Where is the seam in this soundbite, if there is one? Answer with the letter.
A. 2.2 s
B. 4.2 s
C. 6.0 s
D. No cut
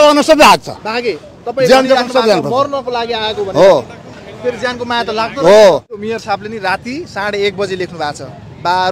C